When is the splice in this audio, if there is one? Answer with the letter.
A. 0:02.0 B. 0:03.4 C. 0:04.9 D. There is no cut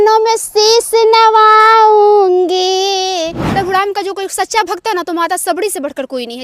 B